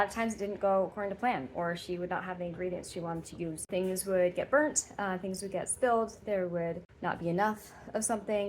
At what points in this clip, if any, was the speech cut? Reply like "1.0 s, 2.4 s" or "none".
3.7 s, 6.9 s